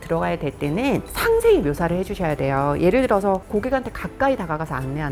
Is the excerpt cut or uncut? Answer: uncut